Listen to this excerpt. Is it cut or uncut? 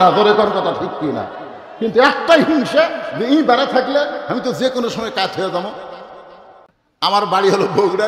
cut